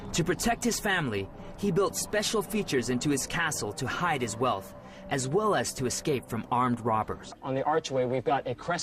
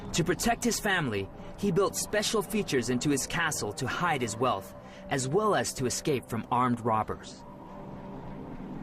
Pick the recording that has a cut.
second; 1 cut; at 7.4 s

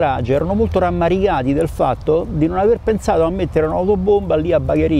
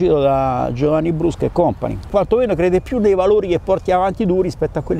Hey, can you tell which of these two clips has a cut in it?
second; 1 cut; at 2.1 s

